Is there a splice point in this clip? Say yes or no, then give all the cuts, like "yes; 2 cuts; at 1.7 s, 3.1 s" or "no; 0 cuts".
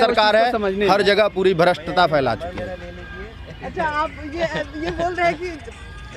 no; 0 cuts